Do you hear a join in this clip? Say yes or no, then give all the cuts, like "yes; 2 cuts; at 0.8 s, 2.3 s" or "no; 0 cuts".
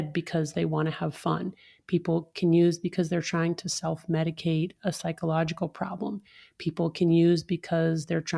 no; 0 cuts